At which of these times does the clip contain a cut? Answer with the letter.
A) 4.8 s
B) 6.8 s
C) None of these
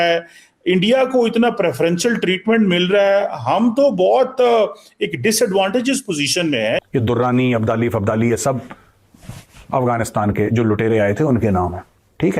B